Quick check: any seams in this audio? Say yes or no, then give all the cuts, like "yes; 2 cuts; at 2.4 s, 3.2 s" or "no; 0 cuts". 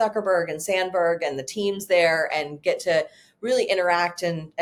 no; 0 cuts